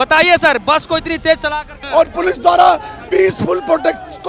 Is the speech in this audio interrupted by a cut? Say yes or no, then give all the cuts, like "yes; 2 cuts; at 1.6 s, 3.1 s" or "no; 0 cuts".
yes; 1 cut; at 1.7 s